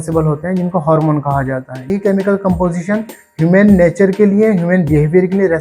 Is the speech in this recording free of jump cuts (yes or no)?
no